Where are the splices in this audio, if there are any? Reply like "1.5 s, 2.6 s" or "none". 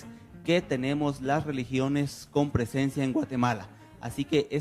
2.9 s